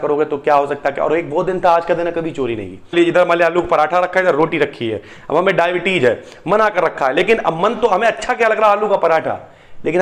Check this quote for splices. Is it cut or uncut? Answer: cut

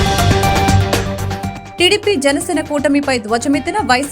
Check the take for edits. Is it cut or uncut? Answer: uncut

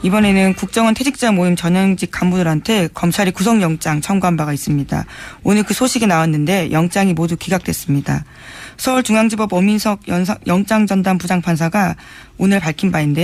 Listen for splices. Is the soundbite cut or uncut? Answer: uncut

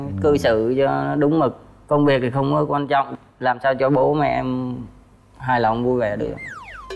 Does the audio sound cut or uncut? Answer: uncut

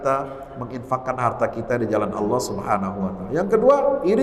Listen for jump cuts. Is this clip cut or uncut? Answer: uncut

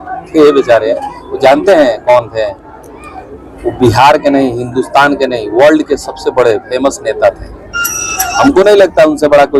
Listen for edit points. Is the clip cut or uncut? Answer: uncut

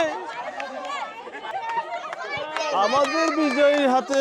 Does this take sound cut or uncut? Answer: cut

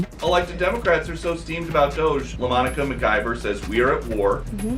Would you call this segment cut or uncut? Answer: uncut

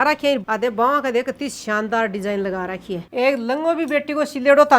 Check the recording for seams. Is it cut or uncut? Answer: cut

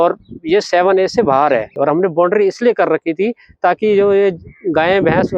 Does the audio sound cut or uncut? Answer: cut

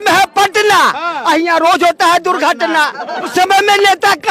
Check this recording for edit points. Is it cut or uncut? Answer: cut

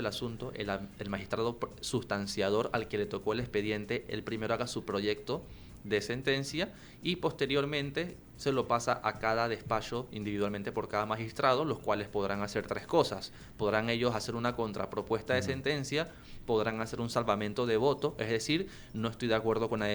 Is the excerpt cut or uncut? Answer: uncut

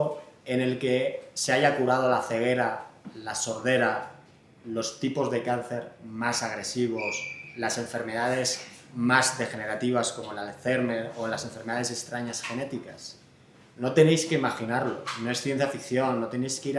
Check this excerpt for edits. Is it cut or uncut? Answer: uncut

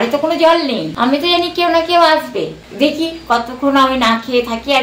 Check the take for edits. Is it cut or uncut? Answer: cut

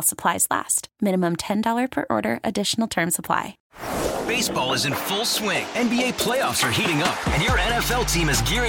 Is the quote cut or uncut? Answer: cut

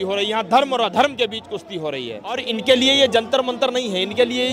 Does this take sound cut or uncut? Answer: cut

